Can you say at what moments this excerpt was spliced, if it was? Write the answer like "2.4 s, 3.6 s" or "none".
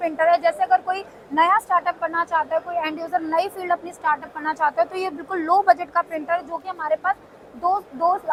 none